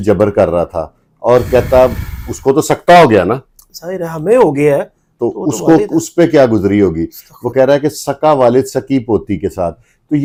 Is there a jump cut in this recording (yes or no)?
no